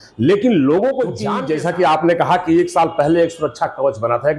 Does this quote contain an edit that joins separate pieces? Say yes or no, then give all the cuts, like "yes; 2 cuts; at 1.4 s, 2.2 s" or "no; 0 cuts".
yes; 1 cut; at 1.3 s